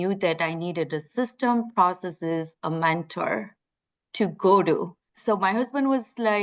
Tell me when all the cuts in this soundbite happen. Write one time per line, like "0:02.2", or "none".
none